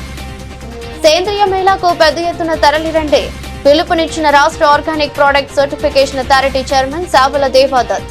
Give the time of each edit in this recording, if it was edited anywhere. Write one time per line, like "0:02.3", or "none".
0:01.0